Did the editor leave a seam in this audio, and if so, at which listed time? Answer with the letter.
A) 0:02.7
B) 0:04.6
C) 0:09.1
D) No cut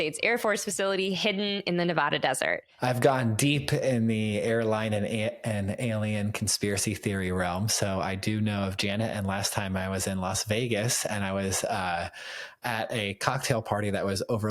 A